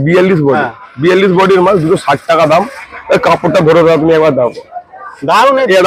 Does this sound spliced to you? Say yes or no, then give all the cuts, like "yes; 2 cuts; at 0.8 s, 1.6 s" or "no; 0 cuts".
no; 0 cuts